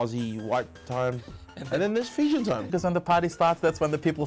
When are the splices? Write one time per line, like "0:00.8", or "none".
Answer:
0:02.6

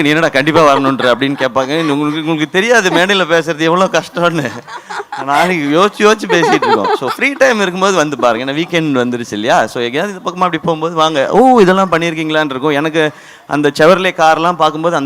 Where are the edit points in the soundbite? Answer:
none

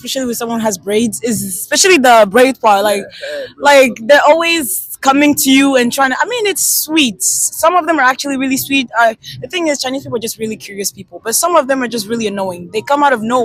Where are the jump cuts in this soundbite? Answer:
none

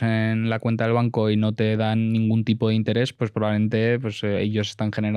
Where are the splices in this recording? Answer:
none

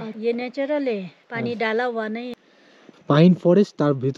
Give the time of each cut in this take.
0:02.3

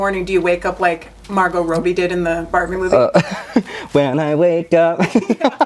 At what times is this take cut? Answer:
none

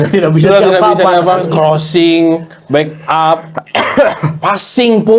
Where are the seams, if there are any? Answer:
none

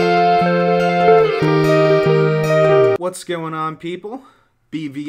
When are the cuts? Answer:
none

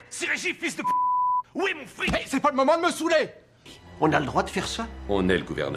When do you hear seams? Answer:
0:03.7

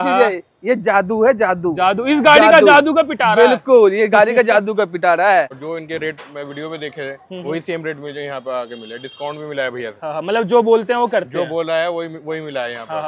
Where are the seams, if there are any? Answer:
0:05.5

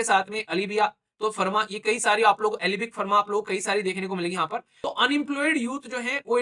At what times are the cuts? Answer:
0:04.7

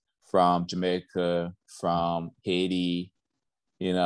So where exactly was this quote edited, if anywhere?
none

